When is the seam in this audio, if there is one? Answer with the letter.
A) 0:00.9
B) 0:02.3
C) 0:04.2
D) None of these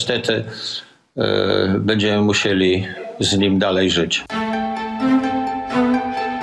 C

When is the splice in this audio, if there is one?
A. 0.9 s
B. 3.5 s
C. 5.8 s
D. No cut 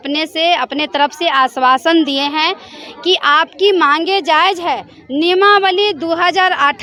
D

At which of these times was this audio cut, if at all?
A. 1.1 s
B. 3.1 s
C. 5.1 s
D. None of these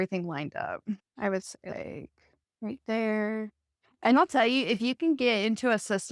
A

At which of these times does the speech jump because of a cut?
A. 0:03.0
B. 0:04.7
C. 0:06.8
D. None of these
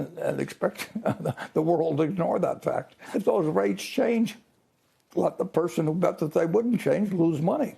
A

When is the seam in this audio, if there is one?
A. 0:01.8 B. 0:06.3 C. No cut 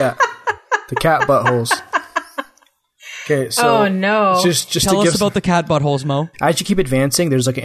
B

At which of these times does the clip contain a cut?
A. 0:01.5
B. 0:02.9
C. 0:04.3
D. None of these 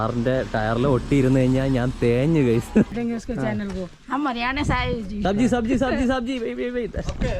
B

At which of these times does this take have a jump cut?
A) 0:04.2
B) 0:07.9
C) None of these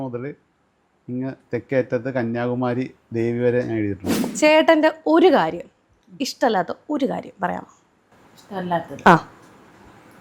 A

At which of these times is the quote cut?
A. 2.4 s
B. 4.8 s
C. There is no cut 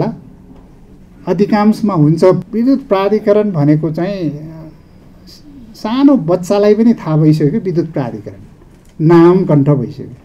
A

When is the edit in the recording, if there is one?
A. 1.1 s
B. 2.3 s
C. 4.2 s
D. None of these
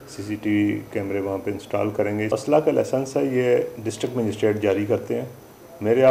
B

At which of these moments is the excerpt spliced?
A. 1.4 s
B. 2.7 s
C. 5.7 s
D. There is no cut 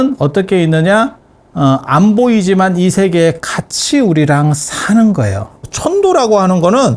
C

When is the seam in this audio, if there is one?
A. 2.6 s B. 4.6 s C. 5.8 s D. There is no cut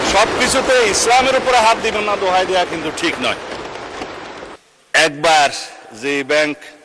B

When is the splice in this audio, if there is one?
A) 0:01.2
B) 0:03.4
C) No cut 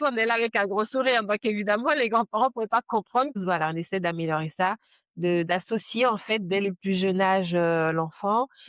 B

